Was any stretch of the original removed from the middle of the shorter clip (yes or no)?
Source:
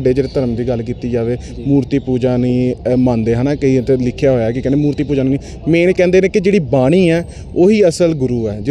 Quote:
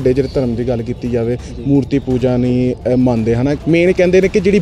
yes